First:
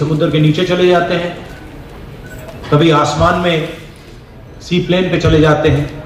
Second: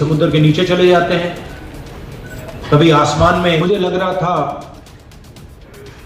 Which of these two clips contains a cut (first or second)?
second